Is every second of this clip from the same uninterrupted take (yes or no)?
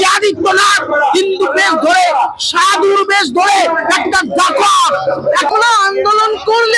no